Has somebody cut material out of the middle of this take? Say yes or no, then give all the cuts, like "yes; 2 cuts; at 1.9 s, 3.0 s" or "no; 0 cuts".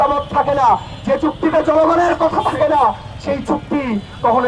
no; 0 cuts